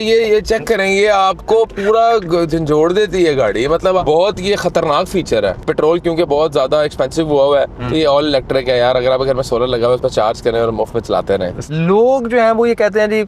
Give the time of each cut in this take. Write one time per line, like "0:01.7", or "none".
0:04.0
0:05.7
0:11.7